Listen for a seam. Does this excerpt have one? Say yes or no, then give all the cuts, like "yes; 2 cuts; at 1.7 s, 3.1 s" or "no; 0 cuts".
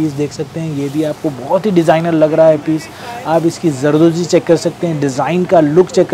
no; 0 cuts